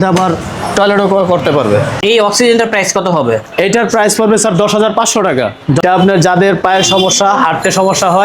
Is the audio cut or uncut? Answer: cut